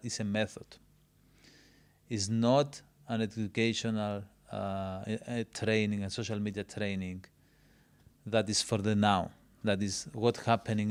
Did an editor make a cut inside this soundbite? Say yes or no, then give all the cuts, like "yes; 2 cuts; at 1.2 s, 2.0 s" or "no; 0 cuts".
no; 0 cuts